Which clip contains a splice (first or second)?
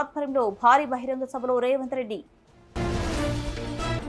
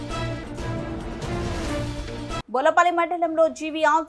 second